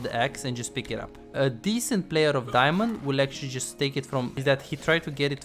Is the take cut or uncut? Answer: cut